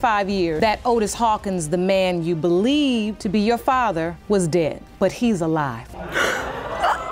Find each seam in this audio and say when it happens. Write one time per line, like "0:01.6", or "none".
none